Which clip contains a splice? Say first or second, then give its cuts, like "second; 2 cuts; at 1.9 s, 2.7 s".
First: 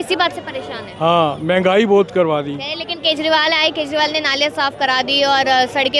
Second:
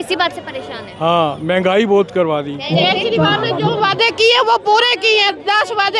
second; 1 cut; at 2.6 s